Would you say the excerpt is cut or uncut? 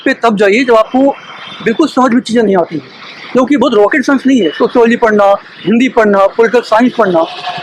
uncut